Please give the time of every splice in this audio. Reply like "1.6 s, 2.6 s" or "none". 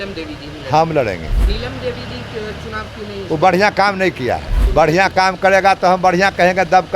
1.5 s, 4.6 s